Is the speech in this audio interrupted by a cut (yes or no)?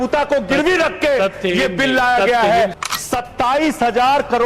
yes